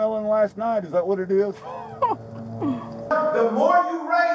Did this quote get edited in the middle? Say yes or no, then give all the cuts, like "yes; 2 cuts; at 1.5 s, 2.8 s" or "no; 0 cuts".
yes; 1 cut; at 3.1 s